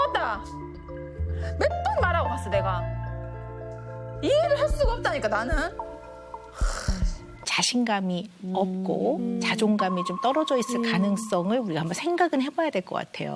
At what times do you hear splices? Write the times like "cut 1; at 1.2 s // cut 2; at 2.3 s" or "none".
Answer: cut 1; at 7.5 s